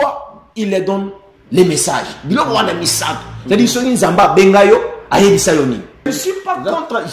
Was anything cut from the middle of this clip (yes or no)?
yes